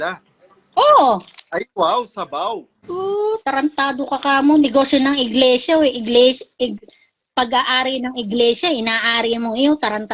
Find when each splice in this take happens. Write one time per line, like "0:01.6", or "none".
0:02.8